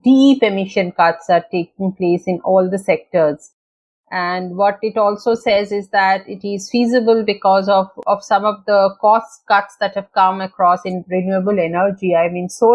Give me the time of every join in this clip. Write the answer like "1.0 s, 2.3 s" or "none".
none